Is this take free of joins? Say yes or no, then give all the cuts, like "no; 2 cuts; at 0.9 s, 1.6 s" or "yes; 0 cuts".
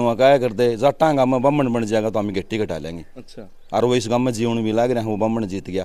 yes; 0 cuts